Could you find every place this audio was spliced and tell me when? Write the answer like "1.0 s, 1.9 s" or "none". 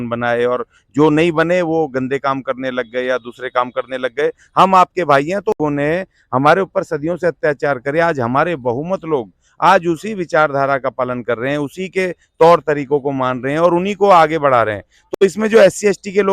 5.6 s, 15.0 s